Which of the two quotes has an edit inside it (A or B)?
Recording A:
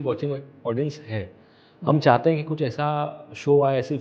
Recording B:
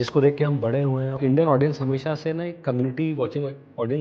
B